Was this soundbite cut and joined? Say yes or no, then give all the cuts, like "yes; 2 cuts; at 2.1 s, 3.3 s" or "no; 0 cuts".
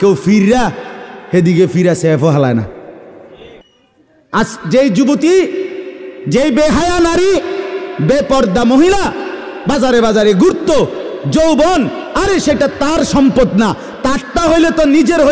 yes; 1 cut; at 3.7 s